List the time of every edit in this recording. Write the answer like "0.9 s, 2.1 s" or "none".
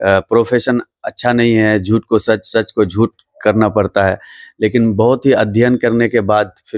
none